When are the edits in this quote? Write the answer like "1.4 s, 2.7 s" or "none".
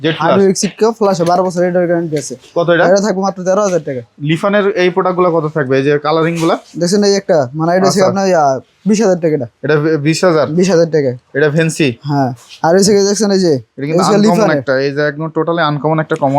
none